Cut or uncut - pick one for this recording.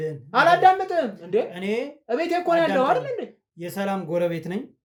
uncut